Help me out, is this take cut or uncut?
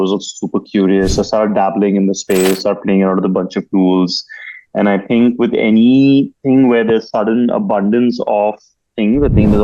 uncut